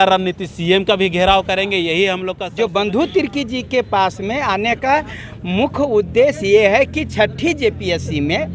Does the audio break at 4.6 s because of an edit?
no; 1 cut; at 2.4 s

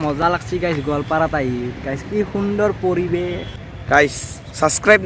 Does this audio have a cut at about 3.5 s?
yes; 1 cut; at 3.5 s

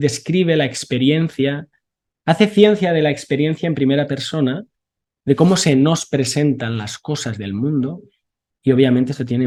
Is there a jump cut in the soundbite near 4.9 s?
no; 0 cuts

